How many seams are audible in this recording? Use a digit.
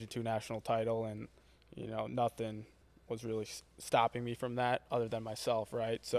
0